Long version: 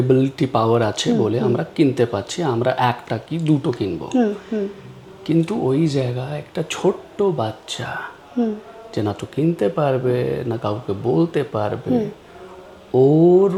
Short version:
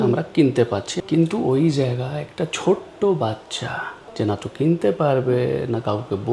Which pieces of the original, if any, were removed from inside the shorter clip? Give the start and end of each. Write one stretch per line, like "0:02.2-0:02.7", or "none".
0:02.3-0:05.1
0:08.1-0:08.7